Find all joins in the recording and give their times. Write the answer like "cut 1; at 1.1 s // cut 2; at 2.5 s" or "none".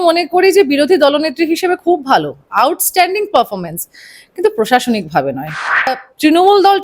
cut 1; at 5.9 s